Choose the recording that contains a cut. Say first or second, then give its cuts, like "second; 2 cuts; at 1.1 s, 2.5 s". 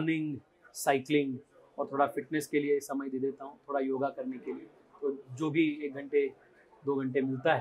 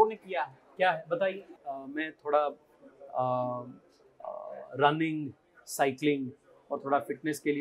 second; 1 cut; at 1.5 s